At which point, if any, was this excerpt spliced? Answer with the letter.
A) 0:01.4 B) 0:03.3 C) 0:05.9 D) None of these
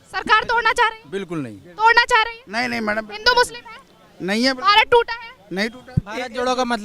C